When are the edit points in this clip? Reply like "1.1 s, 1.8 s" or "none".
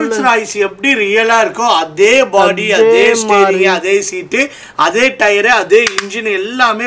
none

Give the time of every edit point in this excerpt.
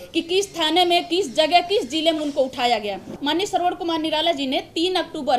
3.2 s

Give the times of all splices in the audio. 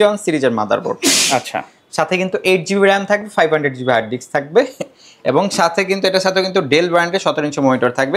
none

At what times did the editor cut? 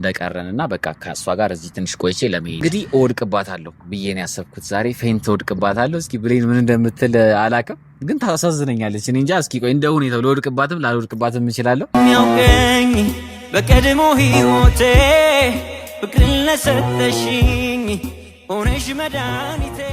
2.6 s, 11.9 s

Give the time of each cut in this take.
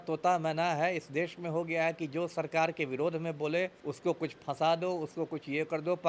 3.8 s

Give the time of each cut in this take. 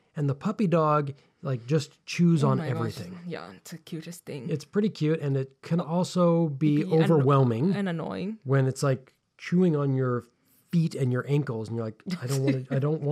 none

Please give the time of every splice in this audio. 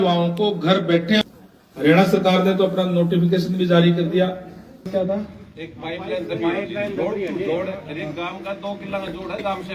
1.2 s, 4.9 s

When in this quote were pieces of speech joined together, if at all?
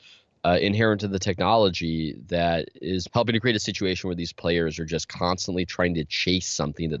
3.0 s

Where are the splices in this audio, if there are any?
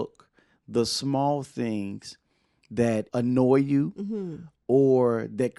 3.1 s

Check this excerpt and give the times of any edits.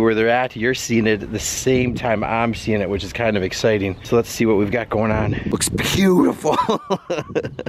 none

